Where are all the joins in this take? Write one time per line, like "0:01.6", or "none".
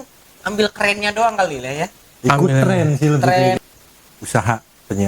0:03.6